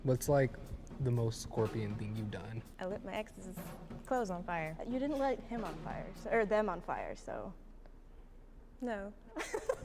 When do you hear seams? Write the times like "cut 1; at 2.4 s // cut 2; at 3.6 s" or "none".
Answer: cut 1; at 2.6 s // cut 2; at 4.8 s